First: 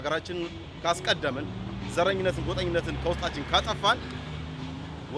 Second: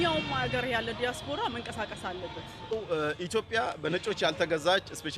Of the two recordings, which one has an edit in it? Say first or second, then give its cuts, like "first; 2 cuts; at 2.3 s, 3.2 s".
second; 1 cut; at 2.7 s